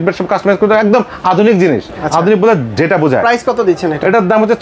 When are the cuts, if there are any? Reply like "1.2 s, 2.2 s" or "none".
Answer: none